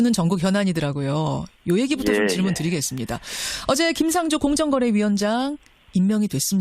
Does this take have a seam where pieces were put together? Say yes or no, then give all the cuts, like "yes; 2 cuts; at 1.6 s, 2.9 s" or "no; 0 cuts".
yes; 1 cut; at 5.2 s